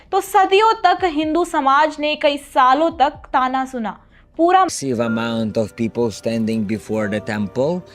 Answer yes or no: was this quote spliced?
yes